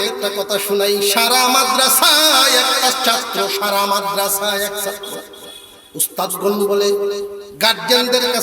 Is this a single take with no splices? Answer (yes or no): no